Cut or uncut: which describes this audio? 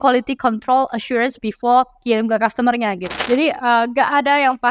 cut